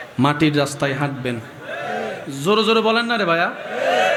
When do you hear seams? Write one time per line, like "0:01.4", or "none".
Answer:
none

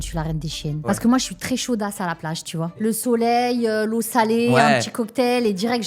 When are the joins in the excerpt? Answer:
0:00.8
0:02.8

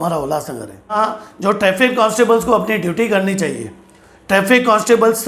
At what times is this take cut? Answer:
0:00.9

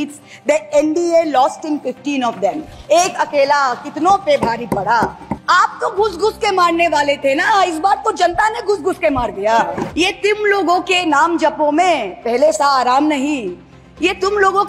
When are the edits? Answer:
0:05.3
0:09.9

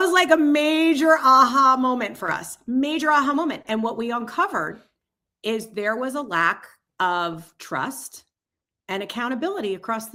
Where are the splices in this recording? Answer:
none

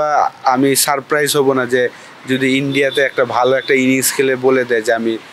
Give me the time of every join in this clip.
none

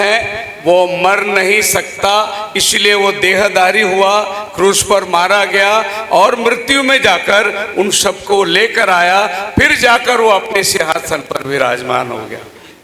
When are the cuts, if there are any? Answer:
none

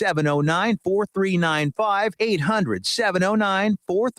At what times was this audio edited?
0:02.1

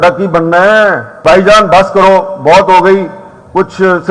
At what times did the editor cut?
0:01.1

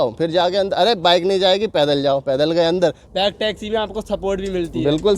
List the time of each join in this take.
0:03.0

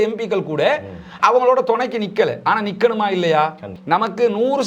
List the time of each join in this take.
0:03.7

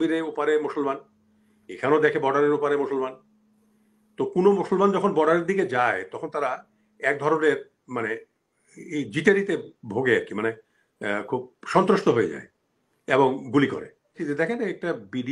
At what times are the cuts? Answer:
0:14.2

